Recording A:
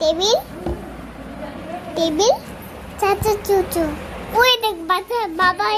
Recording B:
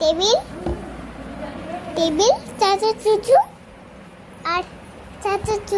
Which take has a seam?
A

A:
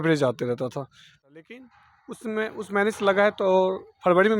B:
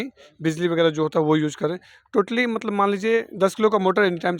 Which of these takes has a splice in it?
A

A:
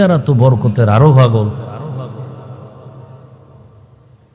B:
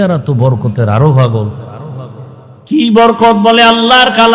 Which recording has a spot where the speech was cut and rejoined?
B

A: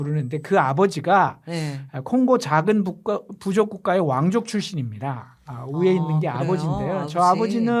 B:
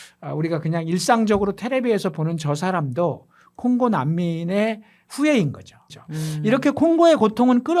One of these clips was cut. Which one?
B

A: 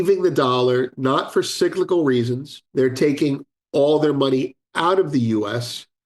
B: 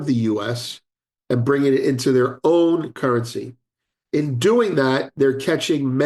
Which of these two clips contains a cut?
A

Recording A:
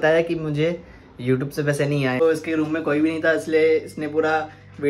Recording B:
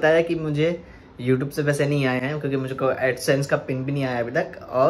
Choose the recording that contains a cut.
A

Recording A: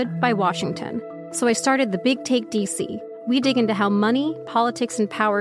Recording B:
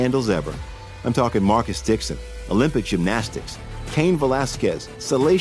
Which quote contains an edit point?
A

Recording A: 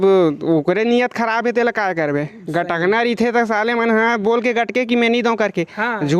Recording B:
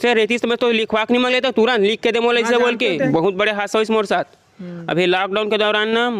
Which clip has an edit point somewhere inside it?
B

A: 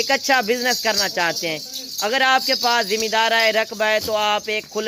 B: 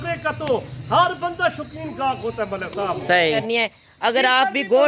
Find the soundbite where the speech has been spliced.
B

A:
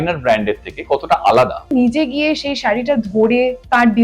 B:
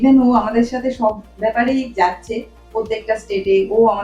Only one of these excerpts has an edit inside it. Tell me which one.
A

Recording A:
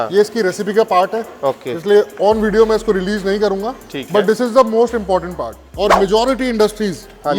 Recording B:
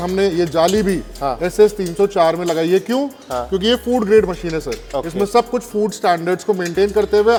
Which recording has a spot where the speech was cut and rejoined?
A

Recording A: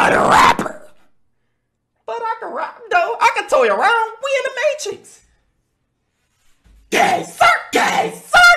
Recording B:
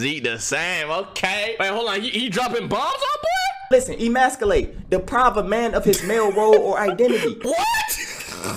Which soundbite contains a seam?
B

